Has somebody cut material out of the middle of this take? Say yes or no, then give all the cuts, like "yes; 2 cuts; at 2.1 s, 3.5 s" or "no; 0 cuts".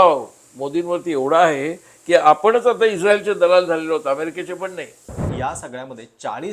yes; 1 cut; at 5.2 s